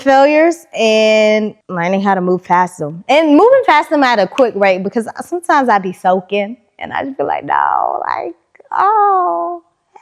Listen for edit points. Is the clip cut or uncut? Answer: cut